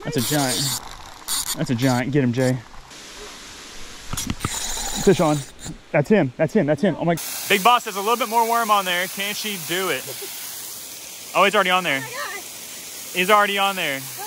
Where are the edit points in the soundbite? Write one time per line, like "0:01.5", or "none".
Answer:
0:02.9
0:07.2